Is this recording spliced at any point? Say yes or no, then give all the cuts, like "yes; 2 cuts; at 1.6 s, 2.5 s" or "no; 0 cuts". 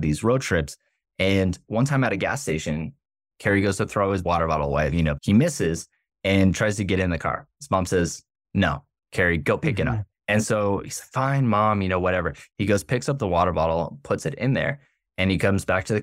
yes; 2 cuts; at 5.2 s, 9.4 s